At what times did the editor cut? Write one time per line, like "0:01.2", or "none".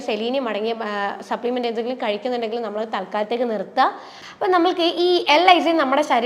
0:04.1

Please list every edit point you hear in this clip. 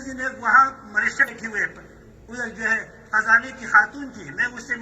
0:01.2

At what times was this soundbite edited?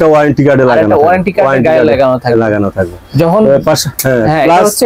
none

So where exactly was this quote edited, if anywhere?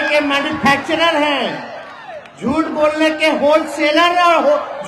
none

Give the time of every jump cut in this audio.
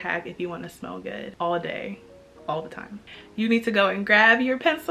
0:03.0

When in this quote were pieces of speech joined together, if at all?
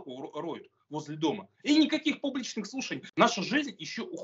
0:03.0

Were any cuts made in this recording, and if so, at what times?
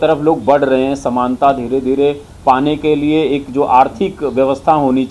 none

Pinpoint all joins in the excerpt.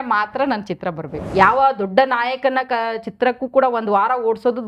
0:01.1

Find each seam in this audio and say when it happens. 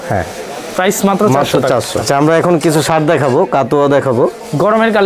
0:02.0

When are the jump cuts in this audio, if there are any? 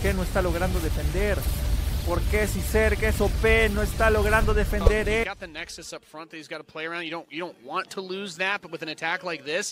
0:05.2

